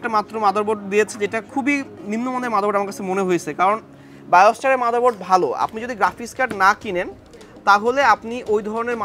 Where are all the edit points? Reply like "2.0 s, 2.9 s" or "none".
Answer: none